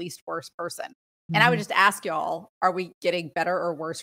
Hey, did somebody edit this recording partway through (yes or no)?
yes